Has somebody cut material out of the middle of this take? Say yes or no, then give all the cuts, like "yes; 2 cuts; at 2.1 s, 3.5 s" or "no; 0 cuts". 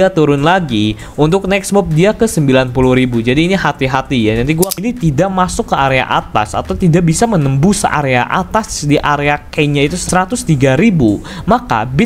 yes; 2 cuts; at 4.7 s, 10.0 s